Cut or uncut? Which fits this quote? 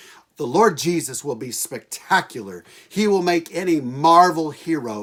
uncut